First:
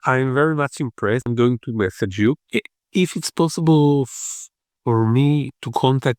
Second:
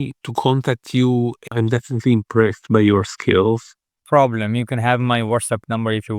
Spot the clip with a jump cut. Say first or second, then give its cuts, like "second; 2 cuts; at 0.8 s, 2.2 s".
first; 1 cut; at 2.4 s